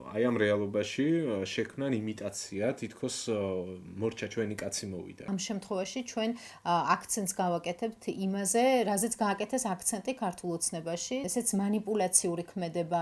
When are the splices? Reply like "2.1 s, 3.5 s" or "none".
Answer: 5.3 s, 11.3 s